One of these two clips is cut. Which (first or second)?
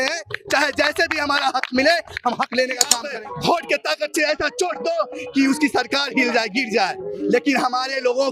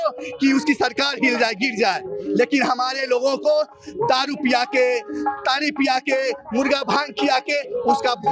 first